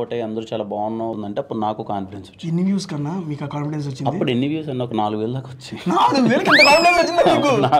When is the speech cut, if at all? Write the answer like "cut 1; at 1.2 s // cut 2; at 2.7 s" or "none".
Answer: cut 1; at 1.1 s

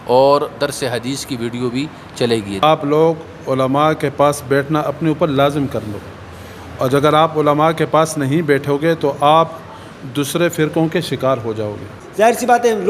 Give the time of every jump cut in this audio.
cut 1; at 2.6 s // cut 2; at 12.0 s

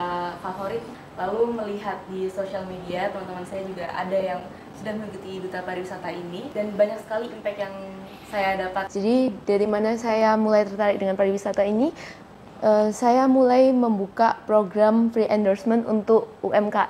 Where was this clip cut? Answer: cut 1; at 0.9 s // cut 2; at 6.5 s // cut 3; at 8.8 s

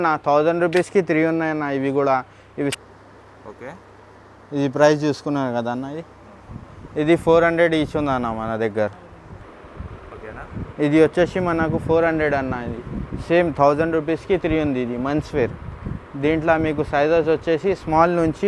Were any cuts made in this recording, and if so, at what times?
cut 1; at 2.7 s // cut 2; at 9.5 s

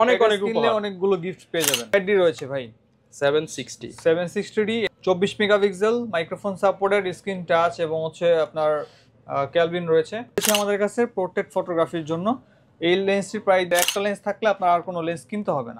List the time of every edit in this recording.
cut 1; at 1.9 s // cut 2; at 4.9 s // cut 3; at 10.4 s // cut 4; at 13.7 s

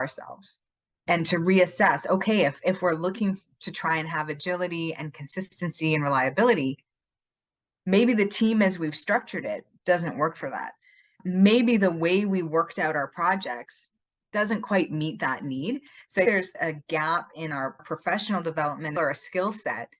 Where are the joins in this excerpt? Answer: cut 1; at 11.2 s // cut 2; at 17.8 s // cut 3; at 19.0 s

